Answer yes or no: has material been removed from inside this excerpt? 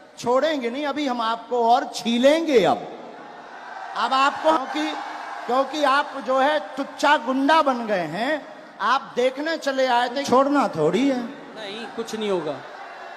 yes